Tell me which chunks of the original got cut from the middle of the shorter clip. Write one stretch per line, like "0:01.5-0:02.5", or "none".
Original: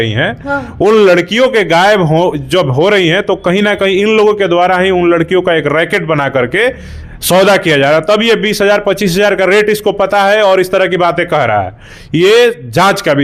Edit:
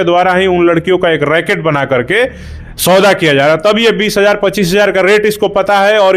none